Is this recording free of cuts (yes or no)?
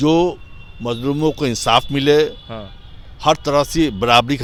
yes